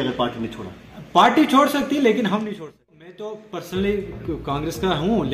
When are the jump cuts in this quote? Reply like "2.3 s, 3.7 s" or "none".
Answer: 2.5 s